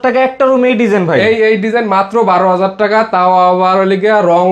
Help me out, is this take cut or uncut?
uncut